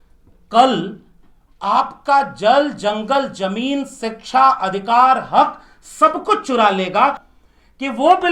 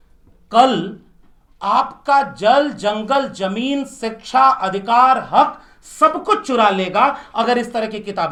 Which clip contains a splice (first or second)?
first